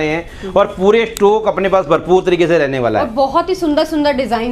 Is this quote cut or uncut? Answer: uncut